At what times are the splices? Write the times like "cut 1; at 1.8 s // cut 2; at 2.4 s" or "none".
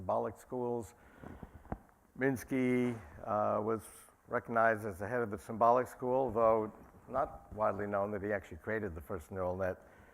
cut 1; at 7.5 s